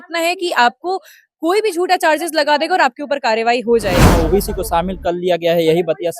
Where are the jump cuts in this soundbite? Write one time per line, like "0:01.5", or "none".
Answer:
0:04.1